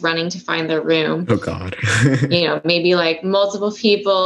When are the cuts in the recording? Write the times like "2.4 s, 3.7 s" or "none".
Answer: none